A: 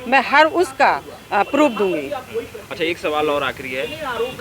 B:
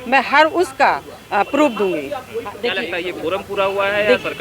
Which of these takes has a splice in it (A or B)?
B